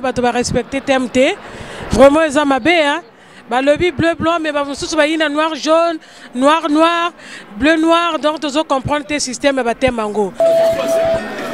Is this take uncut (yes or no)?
no